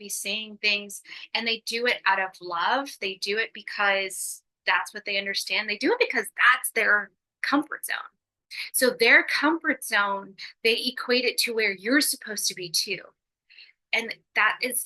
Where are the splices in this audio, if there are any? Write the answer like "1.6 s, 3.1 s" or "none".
none